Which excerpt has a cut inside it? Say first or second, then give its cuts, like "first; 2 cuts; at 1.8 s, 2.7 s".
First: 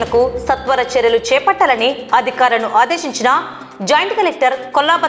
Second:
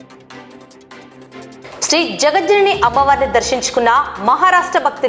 second; 1 cut; at 1.6 s